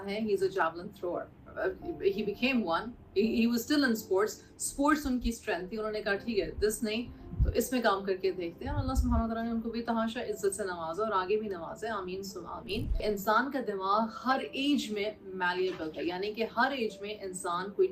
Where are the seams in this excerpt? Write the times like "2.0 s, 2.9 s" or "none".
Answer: 13.0 s